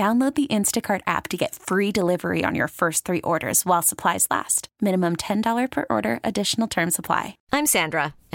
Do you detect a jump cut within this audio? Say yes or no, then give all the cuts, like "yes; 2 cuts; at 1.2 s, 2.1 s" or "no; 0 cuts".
yes; 1 cut; at 7.4 s